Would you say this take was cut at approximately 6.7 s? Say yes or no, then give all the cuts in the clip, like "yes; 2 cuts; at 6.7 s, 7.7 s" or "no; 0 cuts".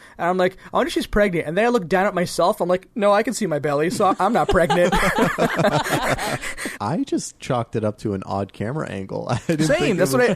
yes; 1 cut; at 6.7 s